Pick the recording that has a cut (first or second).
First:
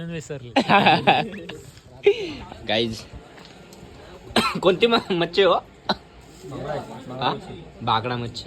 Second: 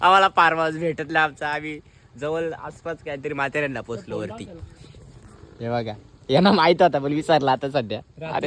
first